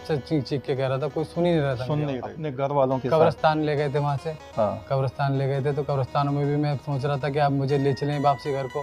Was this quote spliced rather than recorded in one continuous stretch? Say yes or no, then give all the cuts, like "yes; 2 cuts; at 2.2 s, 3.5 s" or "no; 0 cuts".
yes; 1 cut; at 2.5 s